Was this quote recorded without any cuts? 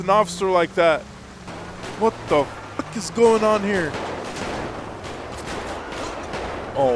yes; 0 cuts

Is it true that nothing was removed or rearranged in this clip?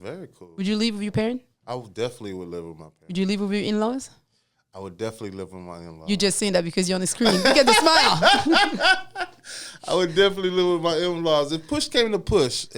yes; 0 cuts

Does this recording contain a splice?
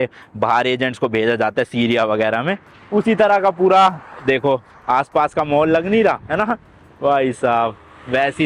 no; 0 cuts

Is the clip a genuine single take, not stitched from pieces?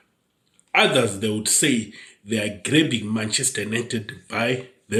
yes; 0 cuts

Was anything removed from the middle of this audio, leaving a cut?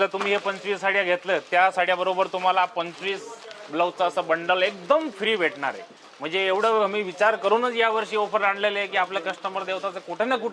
no; 0 cuts

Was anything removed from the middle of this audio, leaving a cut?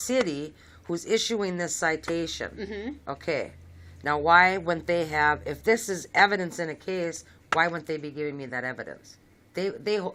no; 0 cuts

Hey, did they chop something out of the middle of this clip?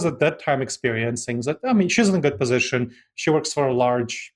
no; 0 cuts

